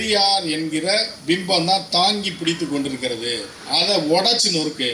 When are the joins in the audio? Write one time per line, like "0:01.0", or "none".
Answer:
0:01.1
0:03.5